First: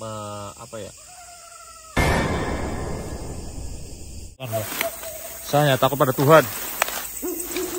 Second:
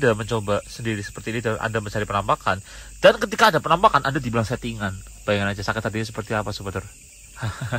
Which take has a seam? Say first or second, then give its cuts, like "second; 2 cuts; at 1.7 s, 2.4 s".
first; 1 cut; at 4.5 s